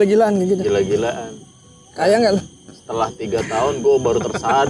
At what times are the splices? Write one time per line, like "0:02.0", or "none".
none